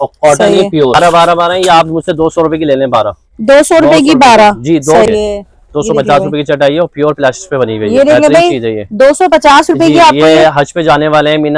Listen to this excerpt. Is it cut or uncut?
cut